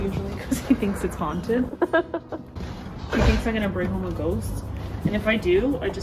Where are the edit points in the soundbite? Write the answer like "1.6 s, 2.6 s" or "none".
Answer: none